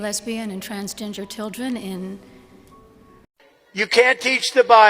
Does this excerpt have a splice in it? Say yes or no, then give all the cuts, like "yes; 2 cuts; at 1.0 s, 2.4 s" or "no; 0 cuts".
yes; 1 cut; at 3.2 s